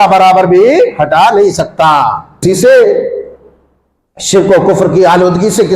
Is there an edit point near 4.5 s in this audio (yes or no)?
no